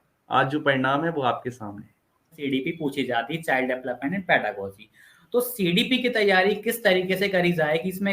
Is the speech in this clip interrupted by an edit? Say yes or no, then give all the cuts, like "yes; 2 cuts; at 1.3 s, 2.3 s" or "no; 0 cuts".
yes; 1 cut; at 2.4 s